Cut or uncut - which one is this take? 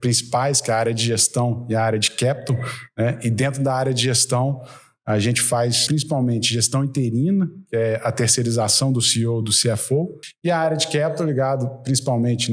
cut